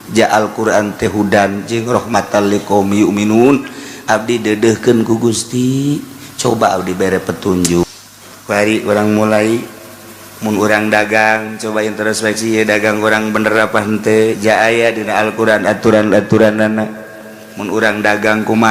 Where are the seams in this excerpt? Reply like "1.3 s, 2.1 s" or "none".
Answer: 7.8 s